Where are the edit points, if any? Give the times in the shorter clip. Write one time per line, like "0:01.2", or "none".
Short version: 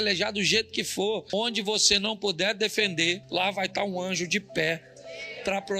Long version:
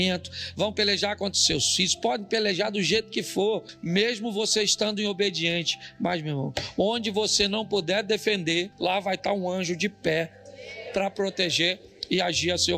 0:01.3